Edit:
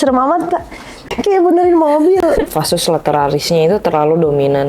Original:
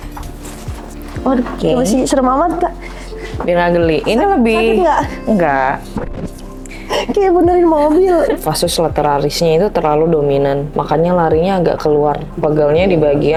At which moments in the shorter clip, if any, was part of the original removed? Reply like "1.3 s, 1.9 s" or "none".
1.1 s

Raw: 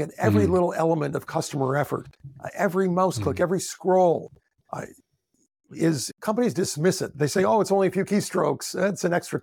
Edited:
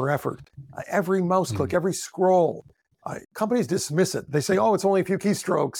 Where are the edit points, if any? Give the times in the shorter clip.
3.2 s

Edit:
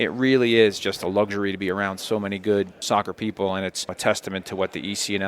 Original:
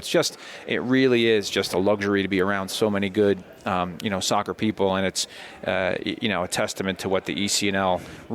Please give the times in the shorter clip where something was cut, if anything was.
2.8 s, 4.0 s

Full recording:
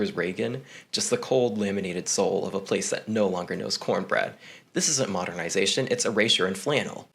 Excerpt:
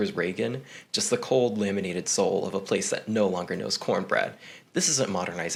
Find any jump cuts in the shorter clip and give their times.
none

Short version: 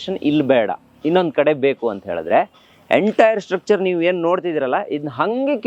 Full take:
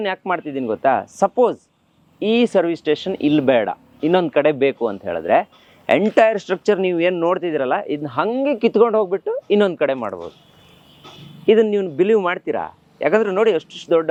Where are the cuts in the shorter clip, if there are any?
none

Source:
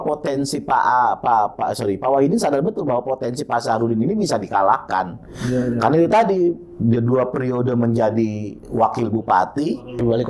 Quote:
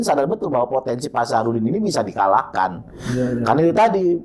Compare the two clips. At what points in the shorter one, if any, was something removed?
none

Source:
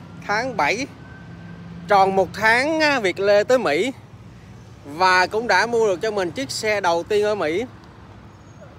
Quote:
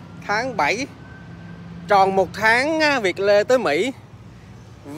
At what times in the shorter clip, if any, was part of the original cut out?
none

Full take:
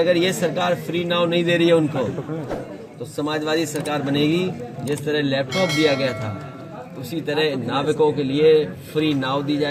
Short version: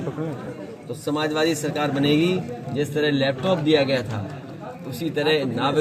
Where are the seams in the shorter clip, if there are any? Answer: none

